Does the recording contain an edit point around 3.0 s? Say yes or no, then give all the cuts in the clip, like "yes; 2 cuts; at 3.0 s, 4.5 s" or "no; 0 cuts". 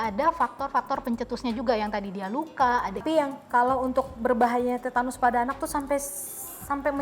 yes; 1 cut; at 3.0 s